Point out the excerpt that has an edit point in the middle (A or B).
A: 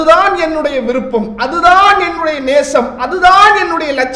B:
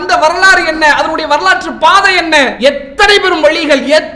B